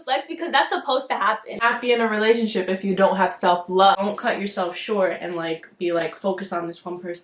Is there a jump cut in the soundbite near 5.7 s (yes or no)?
no